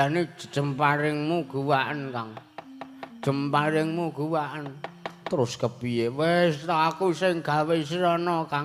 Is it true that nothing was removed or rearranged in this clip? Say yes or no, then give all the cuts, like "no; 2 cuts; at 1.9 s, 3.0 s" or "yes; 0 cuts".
yes; 0 cuts